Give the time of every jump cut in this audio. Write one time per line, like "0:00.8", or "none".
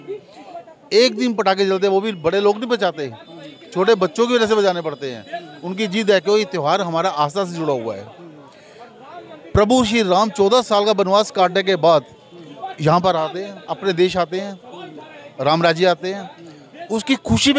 none